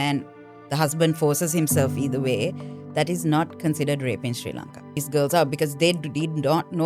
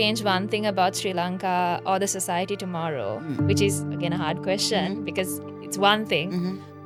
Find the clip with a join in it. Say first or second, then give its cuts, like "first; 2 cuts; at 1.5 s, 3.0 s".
first; 1 cut; at 5.0 s